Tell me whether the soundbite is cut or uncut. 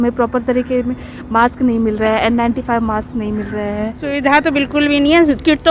cut